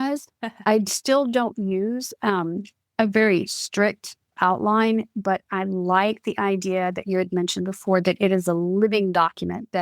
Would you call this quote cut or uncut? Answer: cut